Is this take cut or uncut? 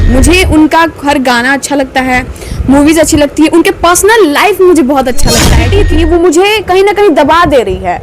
cut